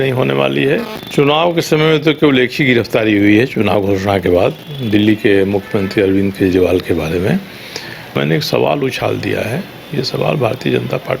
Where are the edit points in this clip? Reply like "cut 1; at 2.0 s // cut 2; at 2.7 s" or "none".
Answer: cut 1; at 1.0 s // cut 2; at 8.1 s